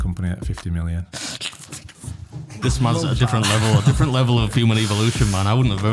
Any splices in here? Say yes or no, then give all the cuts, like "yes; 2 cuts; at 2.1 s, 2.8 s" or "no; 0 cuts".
yes; 2 cuts; at 1.1 s, 2.6 s